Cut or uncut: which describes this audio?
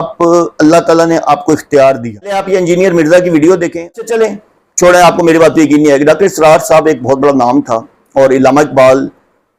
cut